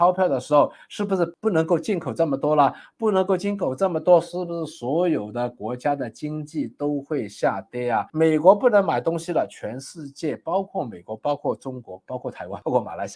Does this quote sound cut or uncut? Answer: uncut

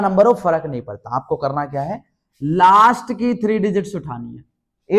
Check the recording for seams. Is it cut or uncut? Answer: uncut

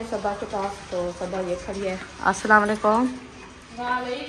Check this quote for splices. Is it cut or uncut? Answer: uncut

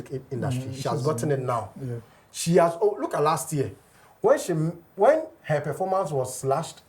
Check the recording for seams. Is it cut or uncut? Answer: uncut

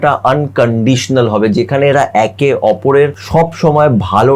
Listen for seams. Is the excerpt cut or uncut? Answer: cut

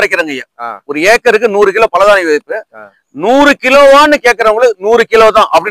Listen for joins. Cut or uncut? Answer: uncut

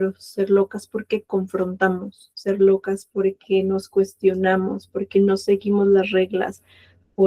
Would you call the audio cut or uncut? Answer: uncut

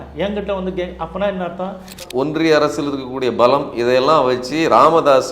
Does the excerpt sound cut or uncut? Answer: cut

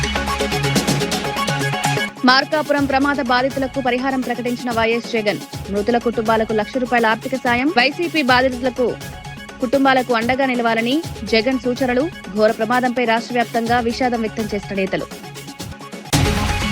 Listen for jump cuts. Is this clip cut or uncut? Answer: cut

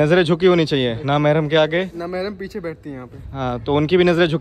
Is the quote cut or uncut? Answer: uncut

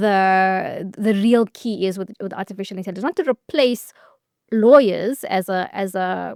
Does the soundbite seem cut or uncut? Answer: uncut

